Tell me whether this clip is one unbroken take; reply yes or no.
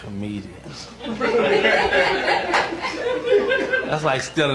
yes